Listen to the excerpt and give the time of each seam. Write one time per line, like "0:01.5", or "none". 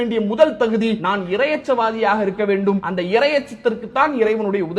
0:01.0
0:02.9